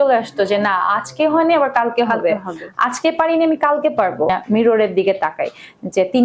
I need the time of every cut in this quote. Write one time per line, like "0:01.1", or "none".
0:04.3